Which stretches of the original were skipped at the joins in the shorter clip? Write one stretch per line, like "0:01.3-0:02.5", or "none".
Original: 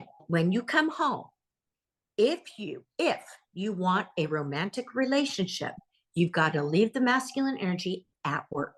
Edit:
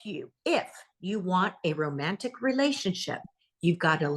none